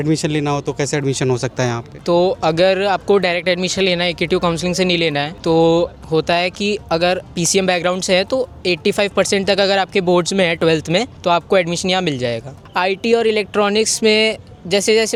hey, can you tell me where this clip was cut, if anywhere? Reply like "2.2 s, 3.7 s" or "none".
none